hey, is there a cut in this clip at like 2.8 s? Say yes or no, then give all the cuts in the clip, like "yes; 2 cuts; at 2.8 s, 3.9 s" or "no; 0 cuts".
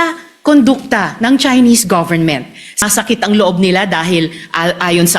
yes; 1 cut; at 2.8 s